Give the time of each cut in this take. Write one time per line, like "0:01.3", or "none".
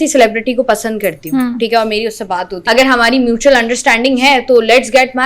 0:02.5